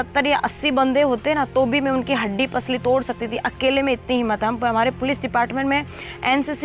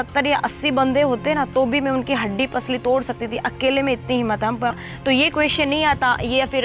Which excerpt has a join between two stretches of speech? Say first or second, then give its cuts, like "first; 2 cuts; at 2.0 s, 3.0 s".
second; 1 cut; at 4.7 s